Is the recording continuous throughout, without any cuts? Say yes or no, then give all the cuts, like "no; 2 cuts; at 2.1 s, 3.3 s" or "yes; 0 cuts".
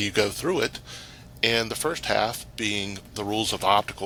yes; 0 cuts